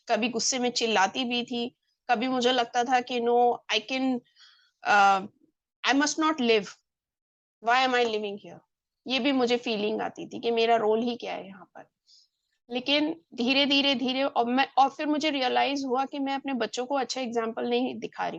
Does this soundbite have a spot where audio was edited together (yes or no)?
no